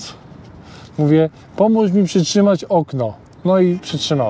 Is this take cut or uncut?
uncut